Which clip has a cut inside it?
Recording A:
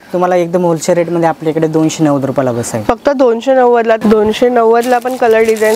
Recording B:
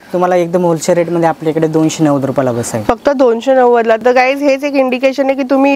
A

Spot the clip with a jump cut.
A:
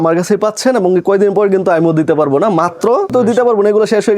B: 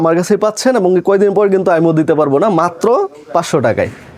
A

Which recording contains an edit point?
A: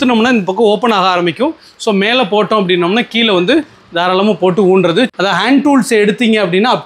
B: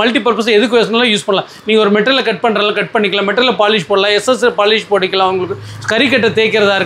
A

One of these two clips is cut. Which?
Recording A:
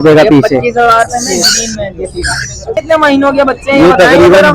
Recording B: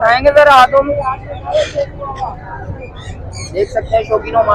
A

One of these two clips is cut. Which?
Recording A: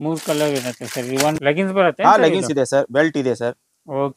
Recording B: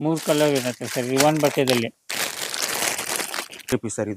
A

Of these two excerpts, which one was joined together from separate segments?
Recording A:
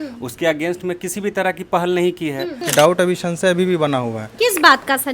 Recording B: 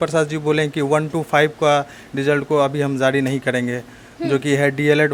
A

